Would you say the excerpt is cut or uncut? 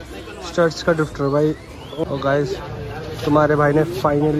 cut